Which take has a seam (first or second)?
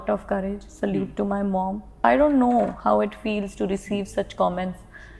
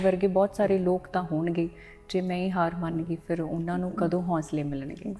first